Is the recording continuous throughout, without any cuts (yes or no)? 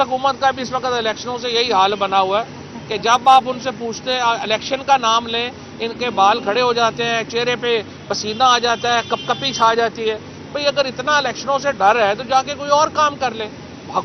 yes